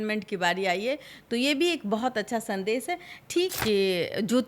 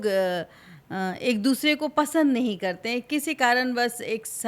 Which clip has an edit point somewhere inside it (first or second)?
first